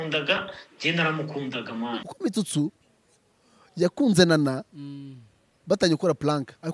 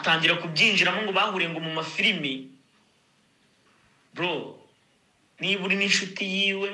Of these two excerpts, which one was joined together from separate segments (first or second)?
first